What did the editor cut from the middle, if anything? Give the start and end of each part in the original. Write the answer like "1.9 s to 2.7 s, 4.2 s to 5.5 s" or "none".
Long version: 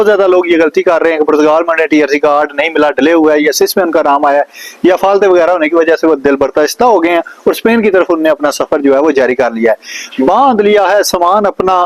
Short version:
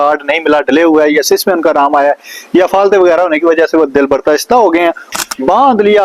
7.3 s to 9.8 s